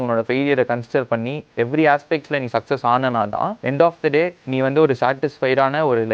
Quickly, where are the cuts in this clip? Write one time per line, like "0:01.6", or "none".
0:03.6
0:04.4